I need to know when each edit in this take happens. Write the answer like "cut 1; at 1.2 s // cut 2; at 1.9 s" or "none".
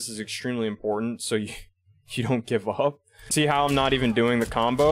cut 1; at 3.2 s